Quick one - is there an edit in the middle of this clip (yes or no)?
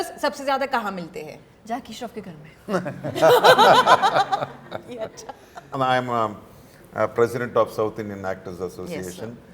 yes